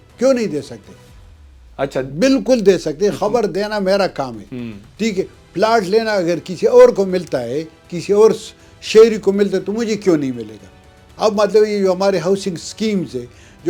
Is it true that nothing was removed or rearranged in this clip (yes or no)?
yes